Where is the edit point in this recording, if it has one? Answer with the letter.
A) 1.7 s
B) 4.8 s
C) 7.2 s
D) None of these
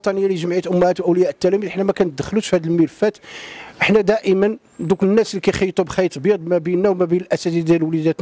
D